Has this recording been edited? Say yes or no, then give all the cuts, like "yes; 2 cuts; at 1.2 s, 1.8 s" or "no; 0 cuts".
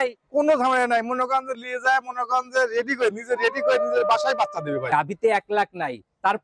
yes; 1 cut; at 4.8 s